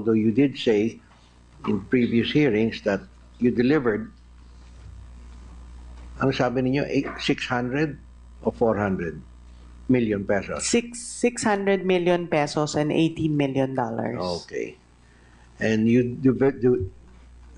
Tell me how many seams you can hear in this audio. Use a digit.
1